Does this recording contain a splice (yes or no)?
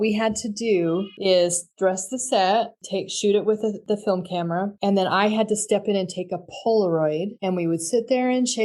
no